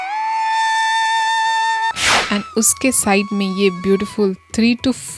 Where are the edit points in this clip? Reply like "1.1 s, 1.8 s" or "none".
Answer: 1.9 s

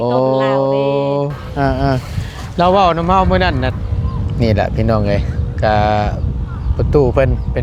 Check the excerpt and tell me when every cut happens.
3.7 s

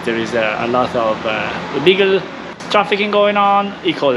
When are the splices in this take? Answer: none

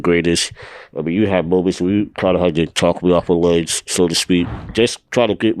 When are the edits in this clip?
4.5 s

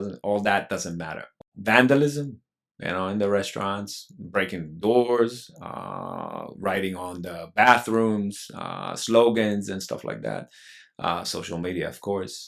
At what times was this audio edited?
1.4 s

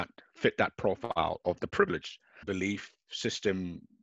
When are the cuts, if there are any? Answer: 2.4 s

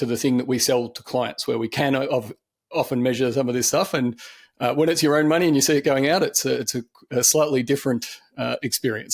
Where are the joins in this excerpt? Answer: none

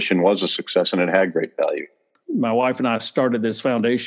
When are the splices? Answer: 2.2 s

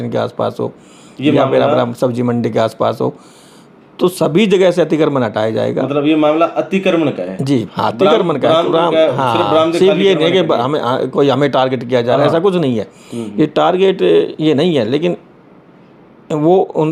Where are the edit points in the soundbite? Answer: none

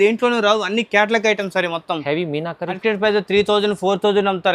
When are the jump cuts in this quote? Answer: 2.8 s

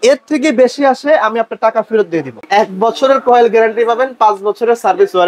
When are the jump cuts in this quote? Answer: 2.3 s

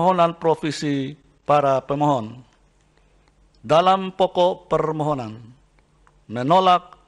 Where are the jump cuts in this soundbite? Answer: none

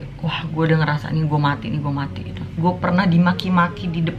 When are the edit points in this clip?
2.5 s

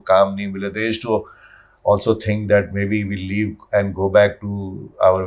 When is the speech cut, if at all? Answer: none

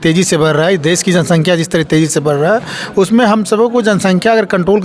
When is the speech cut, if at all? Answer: none

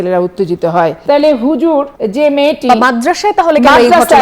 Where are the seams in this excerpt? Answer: 1.0 s, 2.0 s

